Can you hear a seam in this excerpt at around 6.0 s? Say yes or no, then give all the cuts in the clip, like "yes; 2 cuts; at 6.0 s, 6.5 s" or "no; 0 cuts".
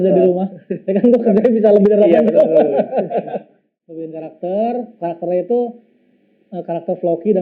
no; 1 cut; at 3.6 s